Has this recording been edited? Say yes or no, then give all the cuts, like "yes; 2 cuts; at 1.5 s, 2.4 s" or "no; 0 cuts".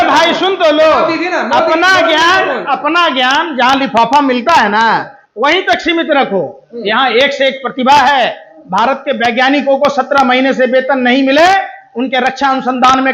no; 0 cuts